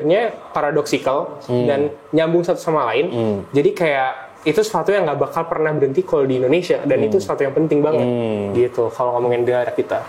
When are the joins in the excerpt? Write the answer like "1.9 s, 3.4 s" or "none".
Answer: none